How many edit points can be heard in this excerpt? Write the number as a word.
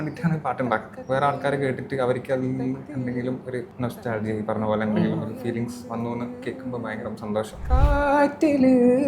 three